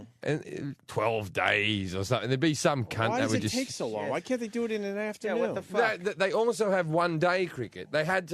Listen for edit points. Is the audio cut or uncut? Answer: cut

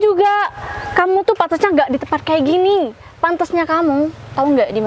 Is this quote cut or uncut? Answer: uncut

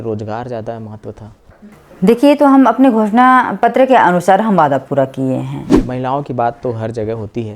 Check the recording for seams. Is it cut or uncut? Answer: cut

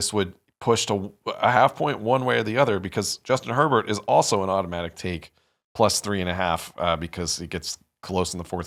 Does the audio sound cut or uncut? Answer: uncut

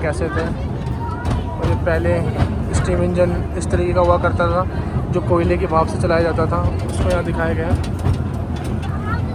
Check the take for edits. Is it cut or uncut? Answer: uncut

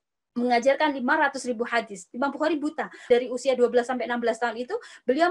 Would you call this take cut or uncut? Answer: cut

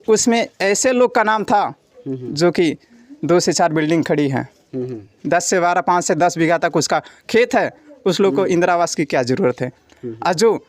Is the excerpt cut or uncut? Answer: uncut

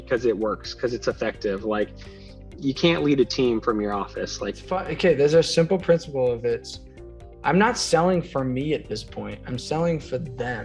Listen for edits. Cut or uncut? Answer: cut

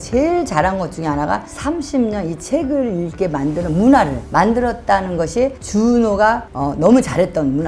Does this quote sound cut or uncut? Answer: uncut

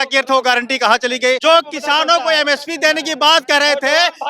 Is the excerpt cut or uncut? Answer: cut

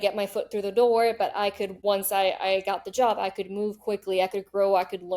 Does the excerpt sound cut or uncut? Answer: cut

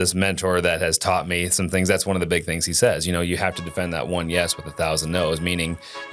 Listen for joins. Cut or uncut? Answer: uncut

